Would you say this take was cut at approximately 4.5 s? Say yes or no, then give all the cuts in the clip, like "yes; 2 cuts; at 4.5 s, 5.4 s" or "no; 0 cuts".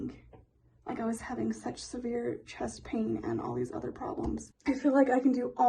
yes; 1 cut; at 4.5 s